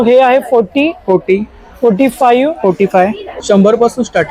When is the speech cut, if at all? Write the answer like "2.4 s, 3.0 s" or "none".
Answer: 3.4 s